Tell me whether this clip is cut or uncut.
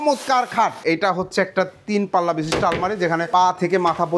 cut